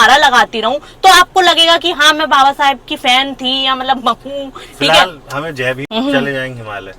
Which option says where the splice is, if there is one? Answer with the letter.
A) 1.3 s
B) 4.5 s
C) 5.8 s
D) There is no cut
C